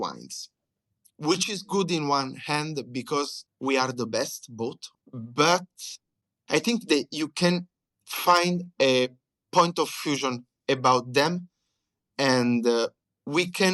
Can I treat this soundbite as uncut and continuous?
no; 1 cut; at 4.9 s

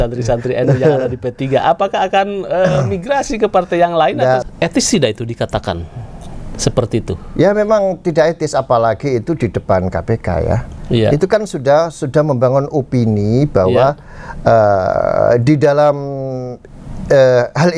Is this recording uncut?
no; 1 cut; at 4.4 s

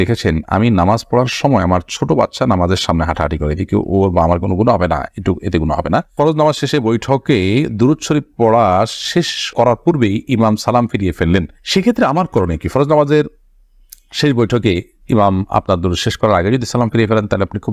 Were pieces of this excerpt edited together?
no; 0 cuts

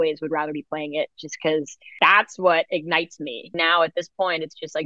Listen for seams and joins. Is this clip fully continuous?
no; 2 cuts; at 1.8 s, 3.5 s

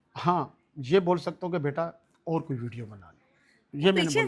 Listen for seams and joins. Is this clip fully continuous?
yes; 0 cuts

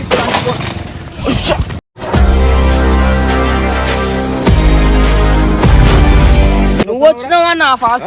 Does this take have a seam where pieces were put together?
yes; 1 cut; at 6.9 s

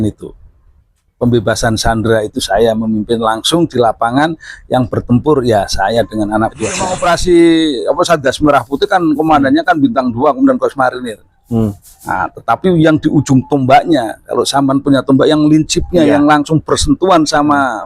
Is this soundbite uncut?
no; 1 cut; at 7.0 s

